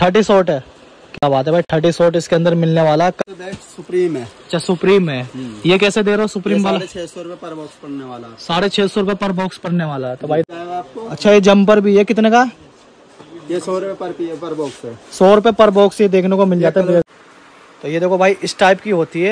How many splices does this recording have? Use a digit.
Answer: 3